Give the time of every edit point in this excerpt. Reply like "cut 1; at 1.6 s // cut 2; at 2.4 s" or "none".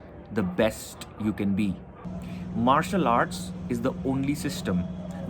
cut 1; at 1.9 s